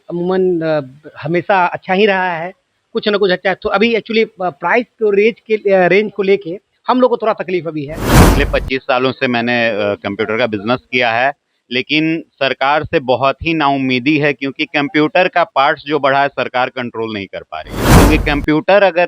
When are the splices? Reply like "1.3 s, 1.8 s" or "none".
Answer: 8.2 s, 18.0 s